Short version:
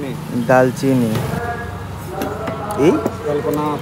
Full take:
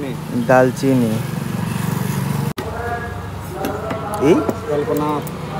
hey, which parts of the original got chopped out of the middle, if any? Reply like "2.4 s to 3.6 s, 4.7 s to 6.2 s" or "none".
1.3 s to 2.7 s